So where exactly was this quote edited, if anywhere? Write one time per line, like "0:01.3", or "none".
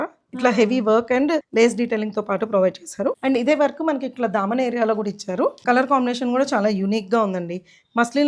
0:01.5
0:03.2
0:05.6

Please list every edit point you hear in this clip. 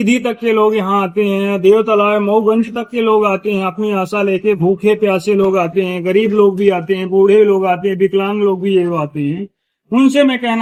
none

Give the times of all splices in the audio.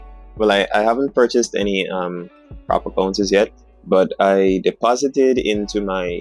none

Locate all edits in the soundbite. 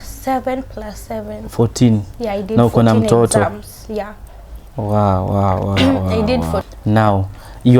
0:06.7

